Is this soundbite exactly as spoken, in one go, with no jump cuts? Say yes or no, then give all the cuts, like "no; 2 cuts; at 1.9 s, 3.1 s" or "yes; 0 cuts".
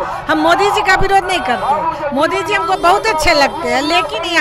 yes; 0 cuts